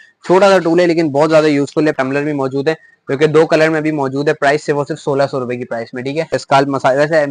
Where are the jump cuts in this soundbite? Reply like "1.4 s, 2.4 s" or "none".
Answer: 1.9 s, 6.4 s